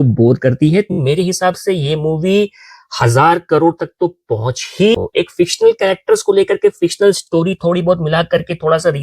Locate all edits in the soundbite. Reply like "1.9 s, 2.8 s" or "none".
1.0 s, 4.9 s